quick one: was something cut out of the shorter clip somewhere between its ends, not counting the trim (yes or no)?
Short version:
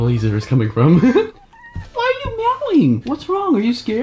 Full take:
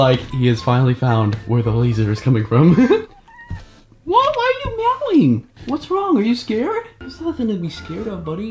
yes